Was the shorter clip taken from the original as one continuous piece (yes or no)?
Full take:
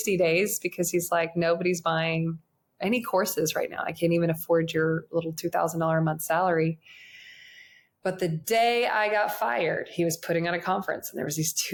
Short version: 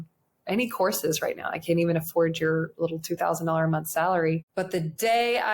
no